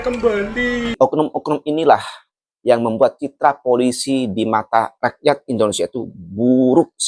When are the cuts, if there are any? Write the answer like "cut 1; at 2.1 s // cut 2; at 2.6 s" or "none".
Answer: cut 1; at 1.0 s